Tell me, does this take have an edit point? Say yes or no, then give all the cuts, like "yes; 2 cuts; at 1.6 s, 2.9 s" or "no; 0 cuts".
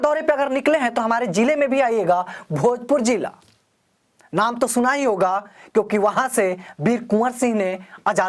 no; 0 cuts